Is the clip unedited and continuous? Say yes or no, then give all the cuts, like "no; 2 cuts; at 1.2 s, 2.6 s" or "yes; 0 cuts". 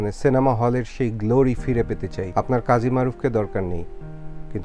no; 1 cut; at 2.2 s